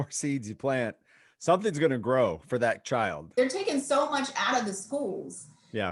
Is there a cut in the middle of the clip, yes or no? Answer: yes